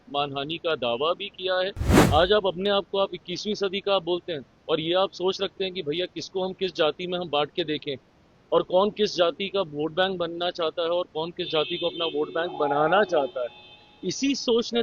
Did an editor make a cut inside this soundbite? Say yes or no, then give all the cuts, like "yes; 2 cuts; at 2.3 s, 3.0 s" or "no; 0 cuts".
yes; 1 cut; at 1.9 s